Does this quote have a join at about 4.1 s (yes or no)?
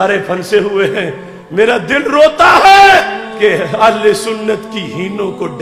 no